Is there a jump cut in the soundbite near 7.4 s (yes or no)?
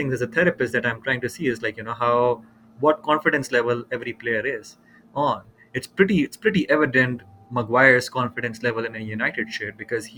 no